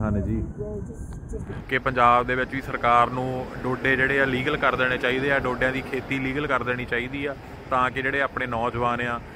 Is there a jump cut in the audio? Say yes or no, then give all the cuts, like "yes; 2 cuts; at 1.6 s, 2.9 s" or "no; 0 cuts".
yes; 1 cut; at 1.5 s